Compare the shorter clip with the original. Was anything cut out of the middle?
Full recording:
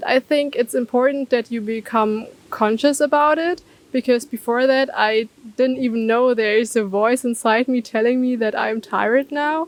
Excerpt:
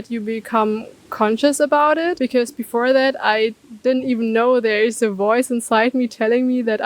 yes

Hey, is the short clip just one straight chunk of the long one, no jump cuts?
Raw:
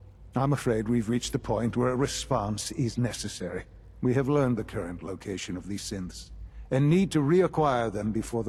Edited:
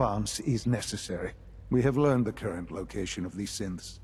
yes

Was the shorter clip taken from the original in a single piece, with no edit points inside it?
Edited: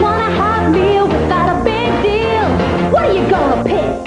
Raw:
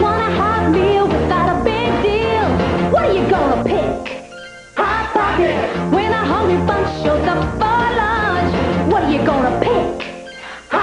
yes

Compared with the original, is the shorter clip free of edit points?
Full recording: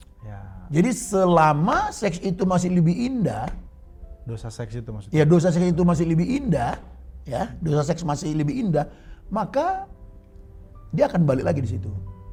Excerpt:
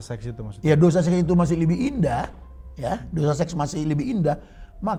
yes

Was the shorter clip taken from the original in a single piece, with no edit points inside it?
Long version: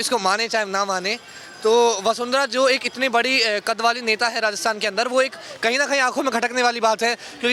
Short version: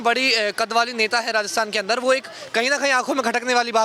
yes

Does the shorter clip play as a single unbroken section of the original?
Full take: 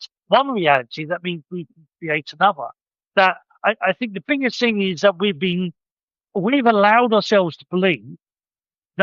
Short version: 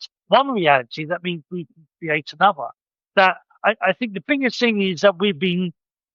yes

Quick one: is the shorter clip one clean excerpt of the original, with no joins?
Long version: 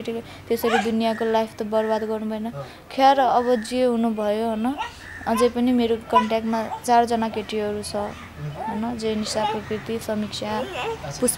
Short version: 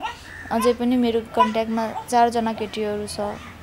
yes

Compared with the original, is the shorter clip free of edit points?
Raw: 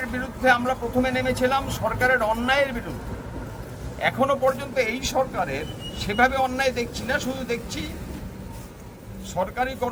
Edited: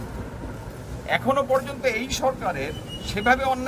yes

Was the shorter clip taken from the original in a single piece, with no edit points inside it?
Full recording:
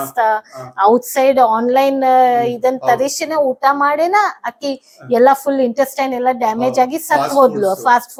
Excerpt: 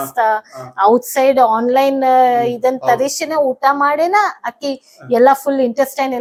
yes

